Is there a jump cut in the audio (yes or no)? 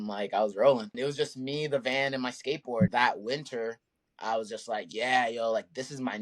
yes